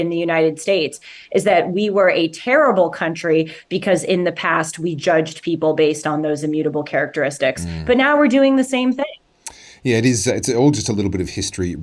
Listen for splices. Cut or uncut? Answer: uncut